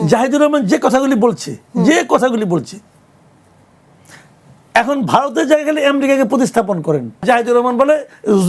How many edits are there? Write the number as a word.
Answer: one